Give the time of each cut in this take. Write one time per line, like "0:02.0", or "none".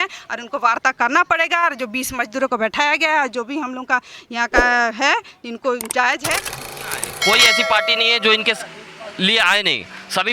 0:06.8